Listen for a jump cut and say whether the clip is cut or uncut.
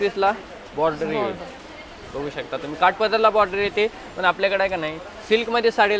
uncut